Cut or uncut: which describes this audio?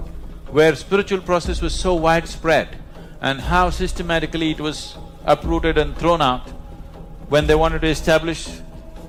uncut